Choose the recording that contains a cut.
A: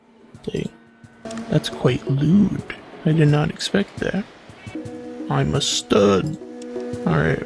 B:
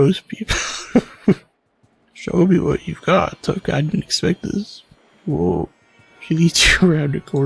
A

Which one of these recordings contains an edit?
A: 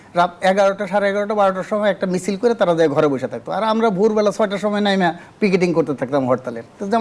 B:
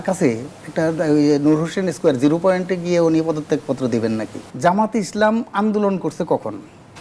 B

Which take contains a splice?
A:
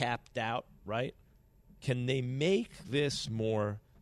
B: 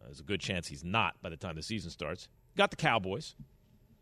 A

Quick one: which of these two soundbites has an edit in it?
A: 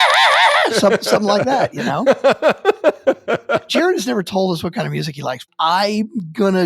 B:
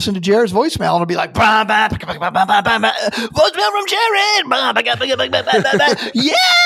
A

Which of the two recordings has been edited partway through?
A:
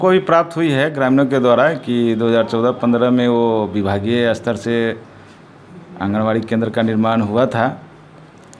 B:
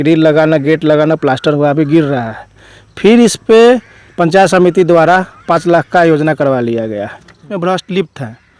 B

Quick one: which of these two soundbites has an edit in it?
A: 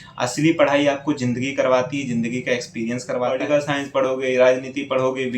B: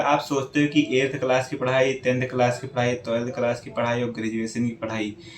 A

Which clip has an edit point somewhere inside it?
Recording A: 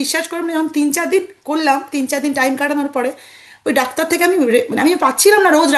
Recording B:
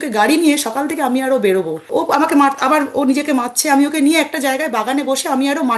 B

